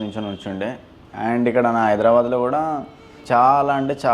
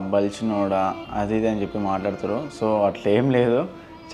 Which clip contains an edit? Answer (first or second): first